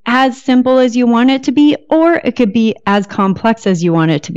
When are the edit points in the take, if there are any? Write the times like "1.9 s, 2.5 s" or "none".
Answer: none